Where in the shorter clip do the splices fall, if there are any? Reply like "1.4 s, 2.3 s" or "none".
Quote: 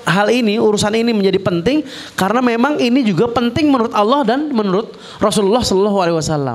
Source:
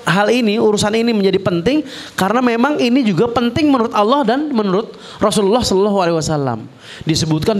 none